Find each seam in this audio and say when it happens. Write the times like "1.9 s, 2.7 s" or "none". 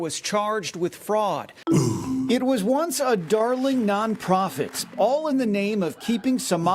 1.5 s, 4.8 s